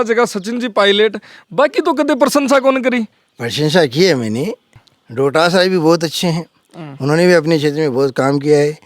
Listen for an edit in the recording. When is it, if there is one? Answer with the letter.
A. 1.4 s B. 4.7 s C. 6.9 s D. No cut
B